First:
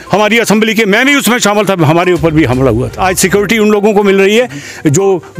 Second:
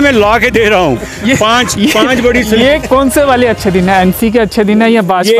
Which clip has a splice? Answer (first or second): first